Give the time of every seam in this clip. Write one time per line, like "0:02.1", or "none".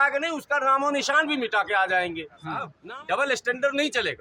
0:02.7

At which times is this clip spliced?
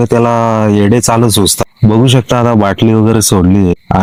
none

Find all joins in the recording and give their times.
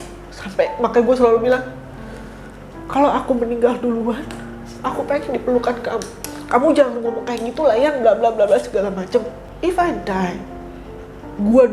0:09.4

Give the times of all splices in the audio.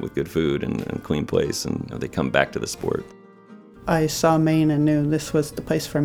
0:02.0
0:03.5

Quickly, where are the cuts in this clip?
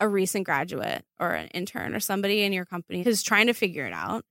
0:03.0

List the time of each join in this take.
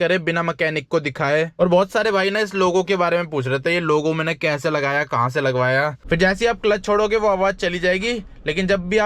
0:01.5
0:06.0

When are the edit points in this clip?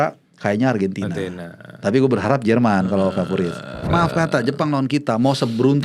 0:03.8

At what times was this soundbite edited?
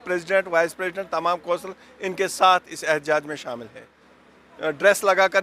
0:03.8

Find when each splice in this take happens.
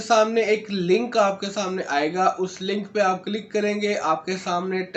none

